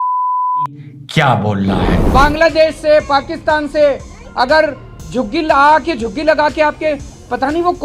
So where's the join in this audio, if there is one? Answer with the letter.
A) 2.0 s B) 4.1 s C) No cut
A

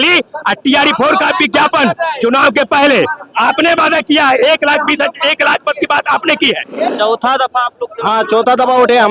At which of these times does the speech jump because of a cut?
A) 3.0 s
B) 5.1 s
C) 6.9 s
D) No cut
C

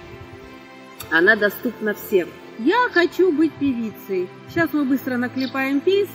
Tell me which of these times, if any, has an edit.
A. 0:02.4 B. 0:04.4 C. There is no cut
A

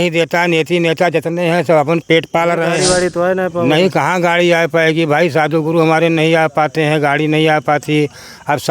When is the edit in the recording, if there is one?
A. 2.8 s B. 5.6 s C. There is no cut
A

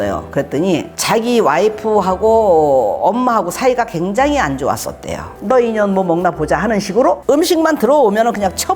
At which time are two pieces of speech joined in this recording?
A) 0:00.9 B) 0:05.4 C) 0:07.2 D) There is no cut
B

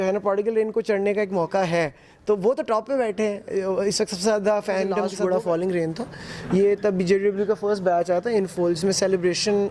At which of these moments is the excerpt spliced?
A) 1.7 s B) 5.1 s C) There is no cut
B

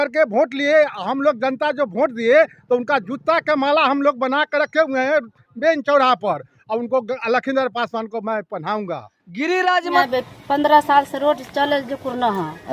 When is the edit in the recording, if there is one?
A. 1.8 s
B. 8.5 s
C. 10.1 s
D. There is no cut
C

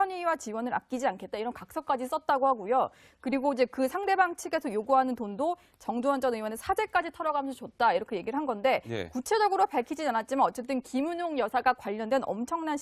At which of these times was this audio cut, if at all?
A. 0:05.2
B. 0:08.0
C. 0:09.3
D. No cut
C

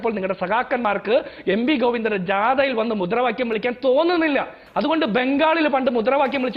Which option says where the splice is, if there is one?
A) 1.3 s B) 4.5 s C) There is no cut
B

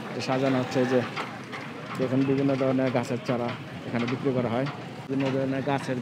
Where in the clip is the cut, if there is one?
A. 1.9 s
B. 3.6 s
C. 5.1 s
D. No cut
C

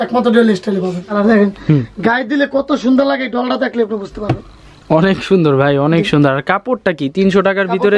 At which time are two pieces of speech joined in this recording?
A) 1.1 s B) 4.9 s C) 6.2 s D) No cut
A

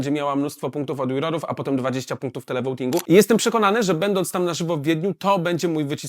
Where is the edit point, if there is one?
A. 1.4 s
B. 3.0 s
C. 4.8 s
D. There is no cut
B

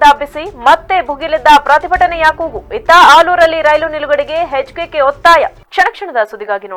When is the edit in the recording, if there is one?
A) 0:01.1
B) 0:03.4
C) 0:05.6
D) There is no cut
D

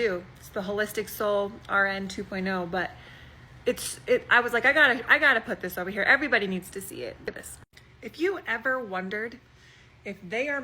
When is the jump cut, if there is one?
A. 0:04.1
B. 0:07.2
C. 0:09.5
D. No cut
B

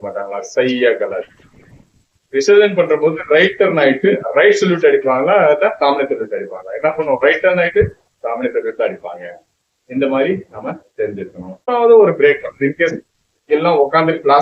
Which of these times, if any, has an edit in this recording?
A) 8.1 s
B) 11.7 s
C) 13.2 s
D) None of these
B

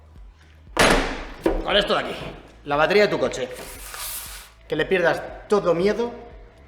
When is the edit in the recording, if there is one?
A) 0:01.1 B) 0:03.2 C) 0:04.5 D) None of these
C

